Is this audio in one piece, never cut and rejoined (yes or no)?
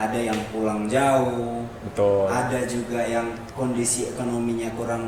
yes